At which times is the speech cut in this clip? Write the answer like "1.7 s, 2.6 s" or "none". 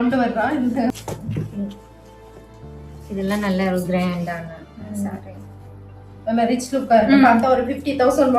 0.9 s